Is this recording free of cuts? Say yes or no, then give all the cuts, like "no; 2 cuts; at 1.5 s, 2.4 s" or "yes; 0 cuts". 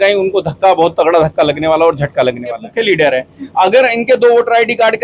no; 1 cut; at 2.7 s